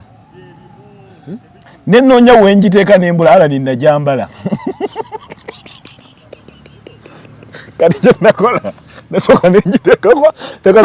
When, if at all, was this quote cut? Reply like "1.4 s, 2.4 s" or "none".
none